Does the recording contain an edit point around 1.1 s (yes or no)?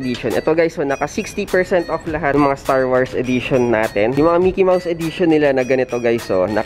no